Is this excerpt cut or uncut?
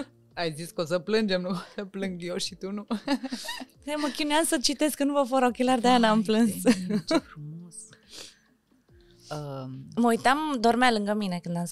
uncut